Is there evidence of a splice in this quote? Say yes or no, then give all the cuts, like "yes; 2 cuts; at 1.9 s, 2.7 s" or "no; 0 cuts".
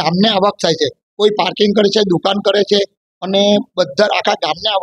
no; 0 cuts